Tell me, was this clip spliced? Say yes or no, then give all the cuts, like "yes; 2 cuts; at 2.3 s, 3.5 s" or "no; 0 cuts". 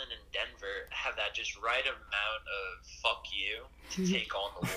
no; 0 cuts